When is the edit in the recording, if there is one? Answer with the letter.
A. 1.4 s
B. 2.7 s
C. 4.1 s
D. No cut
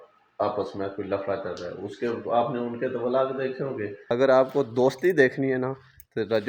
C